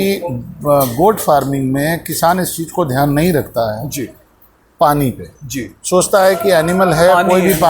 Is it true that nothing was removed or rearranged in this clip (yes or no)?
yes